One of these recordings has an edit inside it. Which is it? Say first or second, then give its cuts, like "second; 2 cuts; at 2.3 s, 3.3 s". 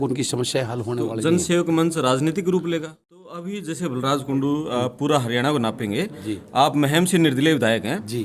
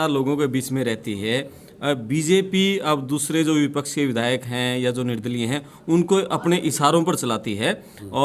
first; 1 cut; at 3.2 s